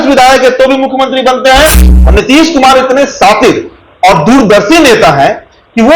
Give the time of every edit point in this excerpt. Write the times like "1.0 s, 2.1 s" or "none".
1.8 s